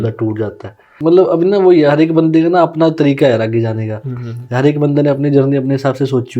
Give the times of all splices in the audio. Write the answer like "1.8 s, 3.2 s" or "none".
1.0 s